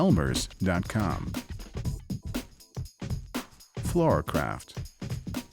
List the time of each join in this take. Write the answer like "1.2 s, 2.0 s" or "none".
1.6 s, 3.9 s, 4.7 s